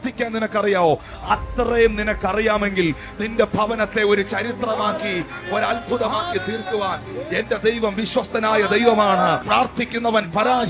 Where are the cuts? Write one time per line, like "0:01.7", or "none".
0:09.4